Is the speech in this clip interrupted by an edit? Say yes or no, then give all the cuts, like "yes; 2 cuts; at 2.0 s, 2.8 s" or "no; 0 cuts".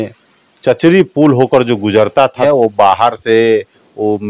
yes; 1 cut; at 2.4 s